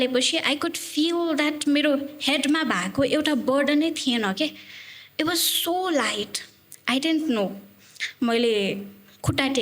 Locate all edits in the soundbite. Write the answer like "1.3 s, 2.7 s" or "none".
none